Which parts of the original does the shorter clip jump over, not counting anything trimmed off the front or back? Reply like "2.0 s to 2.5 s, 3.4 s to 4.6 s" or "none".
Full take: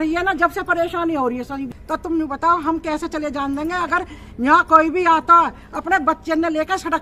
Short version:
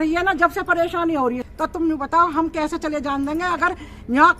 1.5 s to 1.8 s